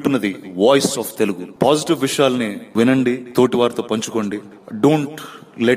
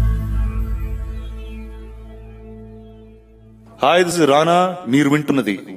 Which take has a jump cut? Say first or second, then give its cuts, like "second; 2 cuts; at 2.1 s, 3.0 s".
second; 2 cuts; at 2.6 s, 4.1 s